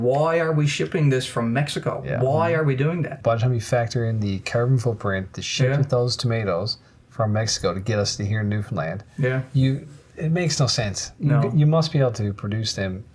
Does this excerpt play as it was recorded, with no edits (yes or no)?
no